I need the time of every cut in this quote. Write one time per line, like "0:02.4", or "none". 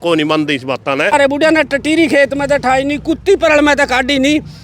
0:01.1